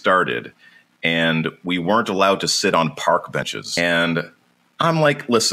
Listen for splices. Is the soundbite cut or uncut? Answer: cut